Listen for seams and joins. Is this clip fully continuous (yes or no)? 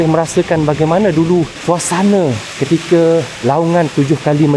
no